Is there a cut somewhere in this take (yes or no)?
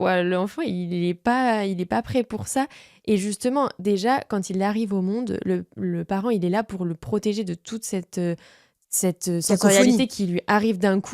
no